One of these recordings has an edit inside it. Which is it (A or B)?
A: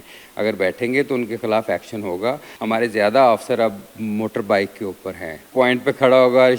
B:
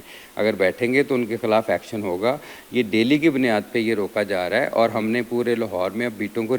A